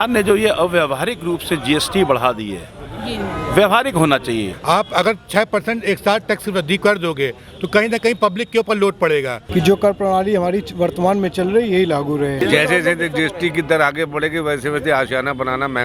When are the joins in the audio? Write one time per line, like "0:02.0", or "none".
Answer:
0:04.5
0:09.4
0:12.4